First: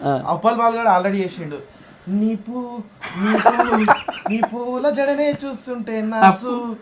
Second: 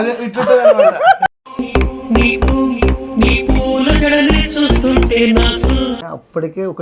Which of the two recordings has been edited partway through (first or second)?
second